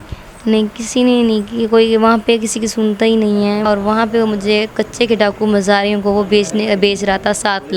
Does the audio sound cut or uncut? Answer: cut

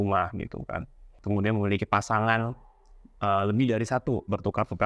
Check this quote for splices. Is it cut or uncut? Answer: cut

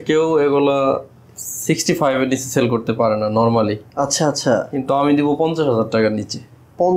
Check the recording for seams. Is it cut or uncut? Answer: uncut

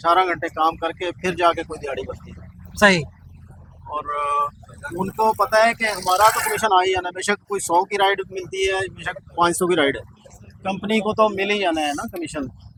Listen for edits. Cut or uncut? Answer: uncut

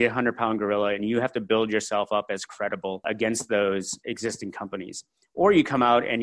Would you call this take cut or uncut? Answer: cut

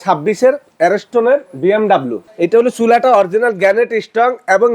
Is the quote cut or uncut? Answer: cut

